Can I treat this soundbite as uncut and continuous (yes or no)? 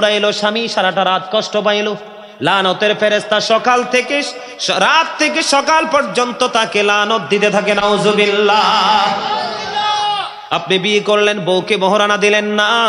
no